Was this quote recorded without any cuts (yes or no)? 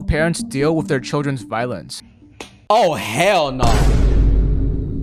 yes